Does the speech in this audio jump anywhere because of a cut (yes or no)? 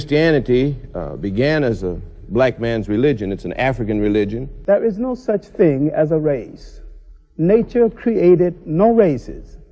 yes